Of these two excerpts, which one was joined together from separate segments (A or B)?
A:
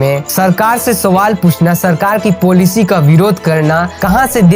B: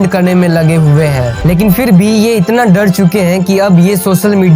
B